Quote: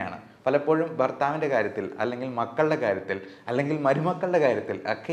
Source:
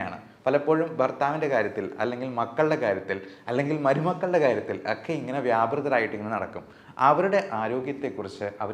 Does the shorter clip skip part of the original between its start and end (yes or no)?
no